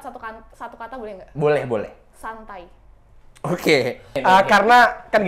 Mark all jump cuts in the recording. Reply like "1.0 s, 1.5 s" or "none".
4.2 s